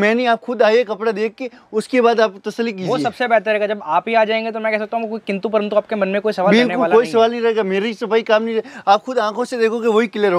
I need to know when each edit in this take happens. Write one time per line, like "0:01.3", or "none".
none